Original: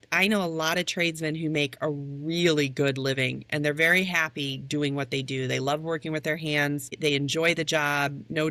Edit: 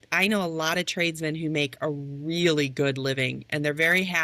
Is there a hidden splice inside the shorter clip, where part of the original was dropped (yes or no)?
no